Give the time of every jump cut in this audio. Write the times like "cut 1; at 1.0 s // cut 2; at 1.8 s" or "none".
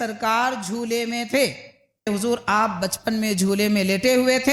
cut 1; at 2.1 s